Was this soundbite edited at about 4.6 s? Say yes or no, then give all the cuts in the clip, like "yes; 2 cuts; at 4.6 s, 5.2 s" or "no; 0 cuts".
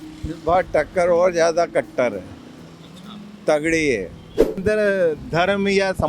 yes; 1 cut; at 4.6 s